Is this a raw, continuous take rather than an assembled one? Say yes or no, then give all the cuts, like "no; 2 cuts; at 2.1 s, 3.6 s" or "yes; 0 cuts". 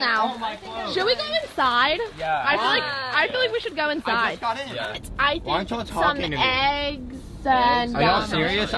no; 1 cut; at 5.1 s